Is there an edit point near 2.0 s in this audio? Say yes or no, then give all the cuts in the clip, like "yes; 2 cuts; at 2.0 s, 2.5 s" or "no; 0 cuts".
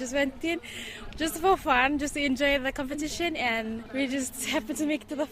no; 1 cut; at 3.8 s